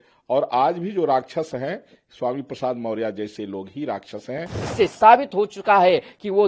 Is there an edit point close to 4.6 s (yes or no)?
yes